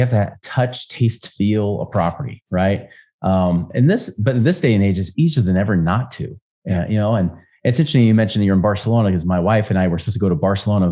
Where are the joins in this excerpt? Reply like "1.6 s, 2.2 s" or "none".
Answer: none